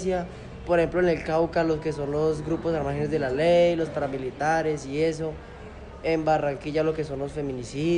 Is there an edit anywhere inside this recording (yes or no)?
no